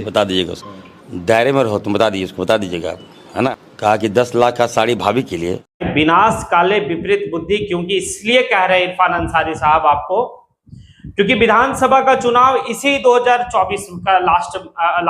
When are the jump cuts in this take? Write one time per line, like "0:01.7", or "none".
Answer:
0:05.6